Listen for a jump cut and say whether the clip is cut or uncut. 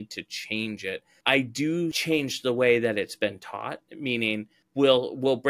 cut